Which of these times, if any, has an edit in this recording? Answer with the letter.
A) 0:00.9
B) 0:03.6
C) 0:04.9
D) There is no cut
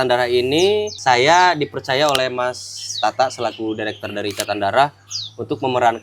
A